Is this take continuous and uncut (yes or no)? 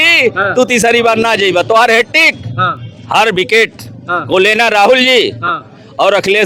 yes